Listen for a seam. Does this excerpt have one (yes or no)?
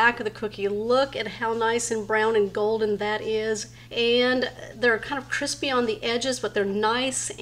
yes